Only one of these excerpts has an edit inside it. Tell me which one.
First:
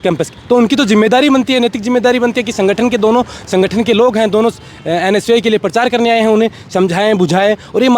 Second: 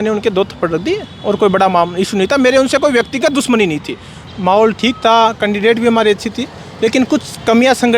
second; 1 cut; at 4.2 s

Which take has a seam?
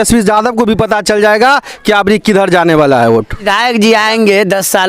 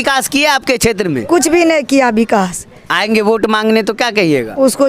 first; 1 cut; at 3.4 s

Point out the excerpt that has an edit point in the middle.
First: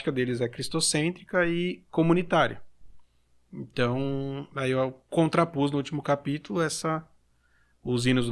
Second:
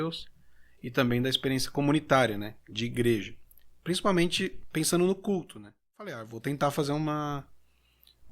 second; 1 cut; at 6.3 s

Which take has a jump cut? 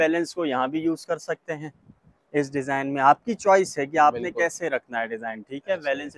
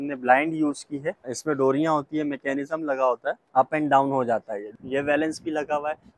second; 3 cuts; at 1.4 s, 3.4 s, 4.7 s

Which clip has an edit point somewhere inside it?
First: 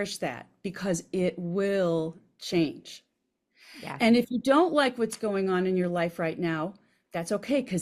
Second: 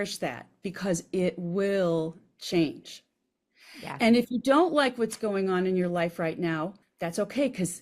second; 1 cut; at 6.8 s

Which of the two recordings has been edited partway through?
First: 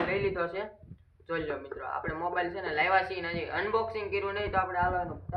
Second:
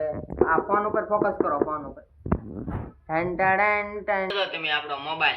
second; 1 cut; at 4.3 s

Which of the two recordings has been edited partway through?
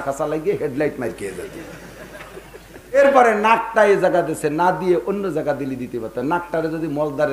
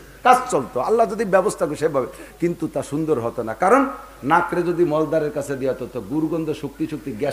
first; 1 cut; at 3.0 s

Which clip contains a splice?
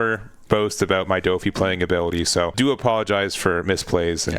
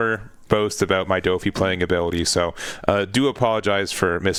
first; 1 cut; at 2.5 s

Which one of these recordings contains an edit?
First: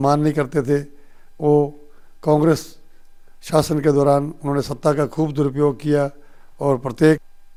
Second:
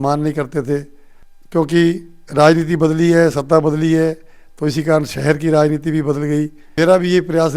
second; 2 cuts; at 1.2 s, 6.6 s

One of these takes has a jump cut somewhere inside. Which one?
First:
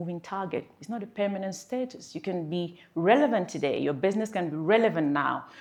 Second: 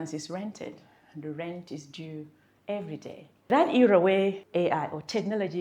second; 2 cuts; at 3.5 s, 4.4 s

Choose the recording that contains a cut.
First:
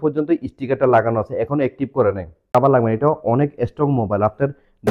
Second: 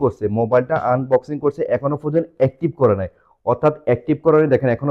first; 1 cut; at 2.5 s

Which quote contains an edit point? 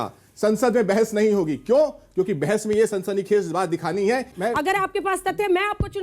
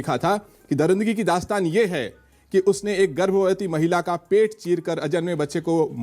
first; 1 cut; at 4.3 s

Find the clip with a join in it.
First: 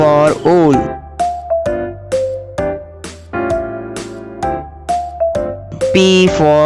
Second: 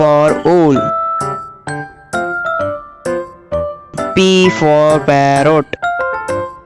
second; 4 cuts; at 0.8 s, 3.2 s, 4.2 s, 5.7 s

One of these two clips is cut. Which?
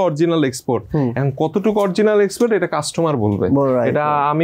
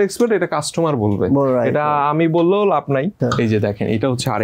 second; 1 cut; at 3.2 s

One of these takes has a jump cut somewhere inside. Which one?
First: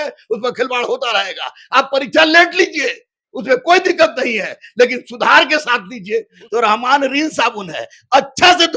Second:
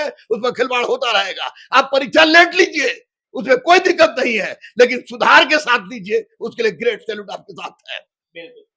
first; 1 cut; at 6.4 s

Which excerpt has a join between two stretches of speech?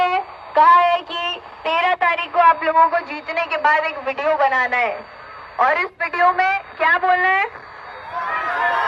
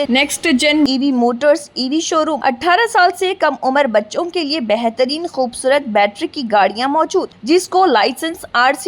second; 1 cut; at 2.4 s

